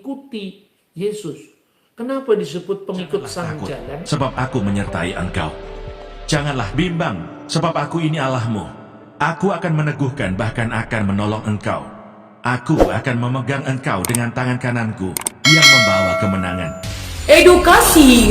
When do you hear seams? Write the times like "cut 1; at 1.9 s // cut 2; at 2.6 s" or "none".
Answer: cut 1; at 4.1 s